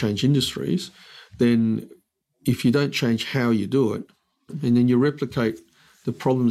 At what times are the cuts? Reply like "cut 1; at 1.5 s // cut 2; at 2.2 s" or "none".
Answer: cut 1; at 4.5 s